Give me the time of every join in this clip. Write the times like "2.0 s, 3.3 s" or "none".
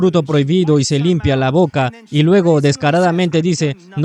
none

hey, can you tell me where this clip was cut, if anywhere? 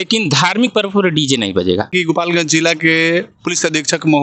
1.9 s

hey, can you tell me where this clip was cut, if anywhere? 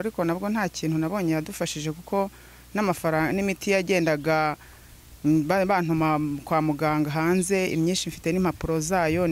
none

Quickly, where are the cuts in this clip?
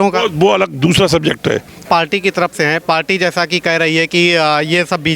1.8 s

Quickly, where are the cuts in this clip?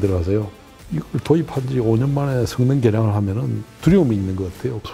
none

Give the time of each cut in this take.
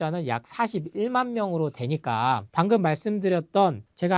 none

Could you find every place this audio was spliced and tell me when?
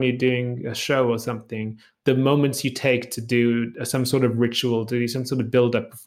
2.0 s

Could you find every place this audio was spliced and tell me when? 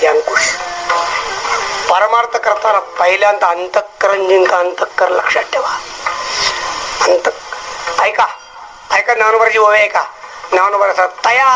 none

